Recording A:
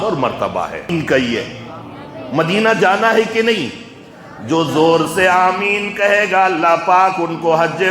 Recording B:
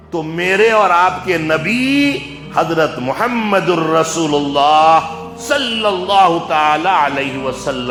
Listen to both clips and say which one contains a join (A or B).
A